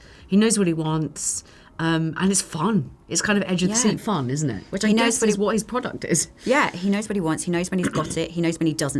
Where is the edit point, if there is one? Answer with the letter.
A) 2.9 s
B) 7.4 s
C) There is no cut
C